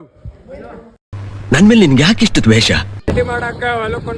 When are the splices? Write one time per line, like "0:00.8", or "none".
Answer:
0:03.0